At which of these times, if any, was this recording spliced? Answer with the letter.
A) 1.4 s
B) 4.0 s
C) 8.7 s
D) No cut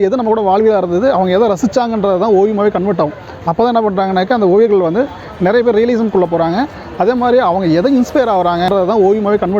C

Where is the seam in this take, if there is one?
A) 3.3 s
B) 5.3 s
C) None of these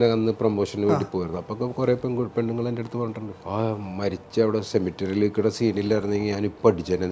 A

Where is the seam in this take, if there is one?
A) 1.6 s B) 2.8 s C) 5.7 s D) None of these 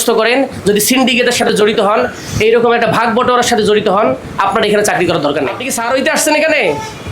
C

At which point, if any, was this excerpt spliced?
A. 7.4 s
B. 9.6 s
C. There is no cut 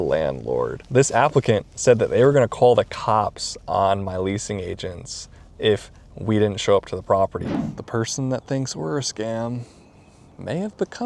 A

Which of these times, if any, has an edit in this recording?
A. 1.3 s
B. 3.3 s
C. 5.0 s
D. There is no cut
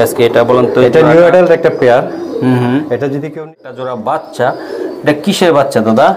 B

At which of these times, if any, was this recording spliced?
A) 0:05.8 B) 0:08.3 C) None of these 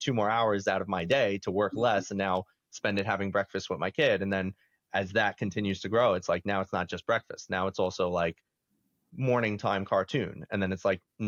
C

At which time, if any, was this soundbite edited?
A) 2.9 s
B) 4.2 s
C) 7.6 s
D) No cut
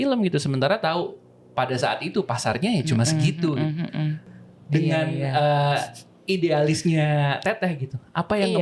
B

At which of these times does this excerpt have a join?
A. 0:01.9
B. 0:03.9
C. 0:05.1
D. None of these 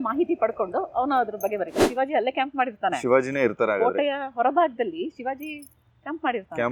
A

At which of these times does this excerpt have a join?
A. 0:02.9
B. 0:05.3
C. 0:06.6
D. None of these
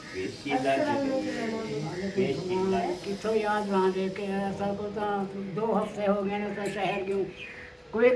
A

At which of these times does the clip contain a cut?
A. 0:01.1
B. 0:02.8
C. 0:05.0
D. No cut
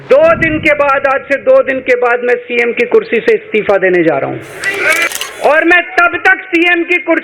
C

